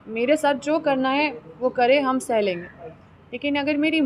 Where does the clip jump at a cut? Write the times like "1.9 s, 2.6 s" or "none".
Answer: none